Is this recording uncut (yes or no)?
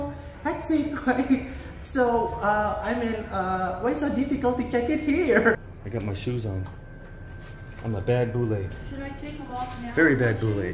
no